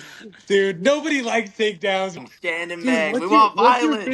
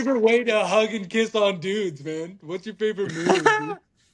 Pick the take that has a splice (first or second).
first